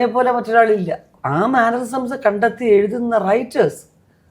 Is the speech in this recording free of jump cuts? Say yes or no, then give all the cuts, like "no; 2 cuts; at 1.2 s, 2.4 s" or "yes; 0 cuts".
no; 1 cut; at 1.1 s